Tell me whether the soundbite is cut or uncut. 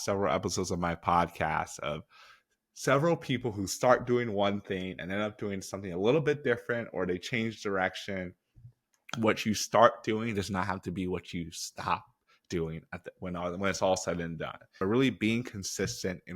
cut